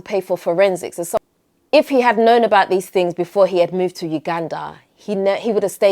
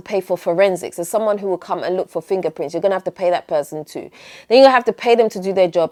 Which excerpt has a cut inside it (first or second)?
first